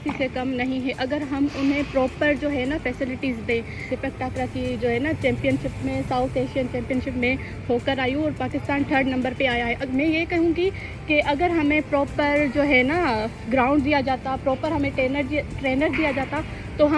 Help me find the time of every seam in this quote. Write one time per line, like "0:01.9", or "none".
none